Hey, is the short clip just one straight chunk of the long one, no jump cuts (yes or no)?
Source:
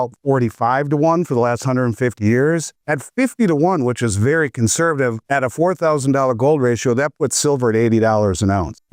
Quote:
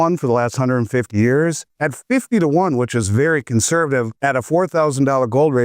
yes